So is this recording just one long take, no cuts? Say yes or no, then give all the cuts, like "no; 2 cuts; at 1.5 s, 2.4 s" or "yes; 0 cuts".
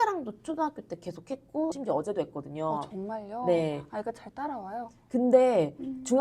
no; 1 cut; at 1.8 s